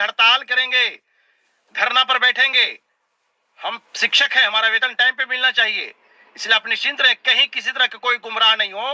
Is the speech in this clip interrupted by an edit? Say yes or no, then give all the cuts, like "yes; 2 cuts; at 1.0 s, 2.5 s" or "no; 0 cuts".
no; 0 cuts